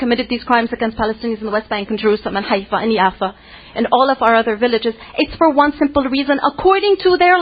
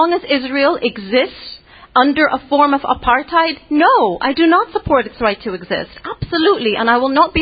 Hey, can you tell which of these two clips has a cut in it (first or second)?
second